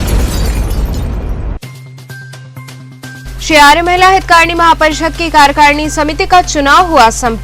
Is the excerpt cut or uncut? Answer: cut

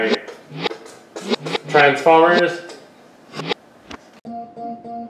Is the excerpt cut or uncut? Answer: cut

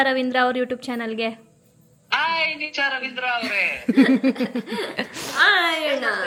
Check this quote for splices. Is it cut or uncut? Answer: uncut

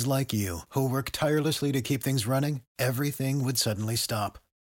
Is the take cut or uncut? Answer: uncut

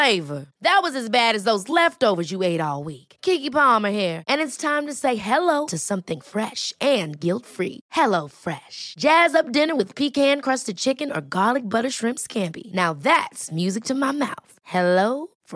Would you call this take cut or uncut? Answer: uncut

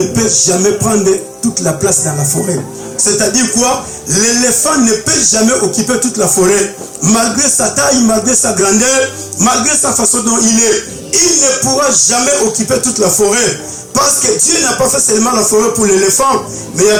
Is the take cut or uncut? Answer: uncut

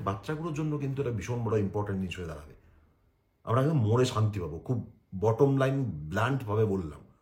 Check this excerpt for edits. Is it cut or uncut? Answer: uncut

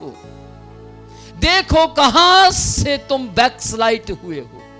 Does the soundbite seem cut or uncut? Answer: uncut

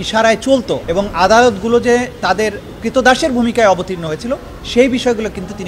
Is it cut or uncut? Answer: uncut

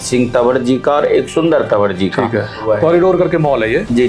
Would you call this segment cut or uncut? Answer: cut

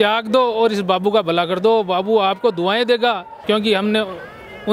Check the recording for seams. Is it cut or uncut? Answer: cut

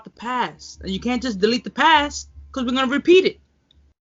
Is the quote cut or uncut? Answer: uncut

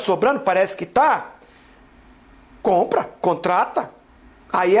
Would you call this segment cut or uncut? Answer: uncut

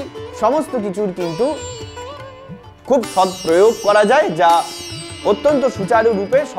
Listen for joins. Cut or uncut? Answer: uncut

